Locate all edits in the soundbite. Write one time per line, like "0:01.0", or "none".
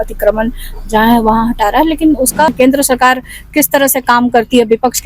0:02.5